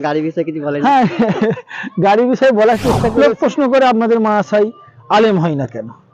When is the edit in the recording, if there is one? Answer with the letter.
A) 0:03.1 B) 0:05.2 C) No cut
A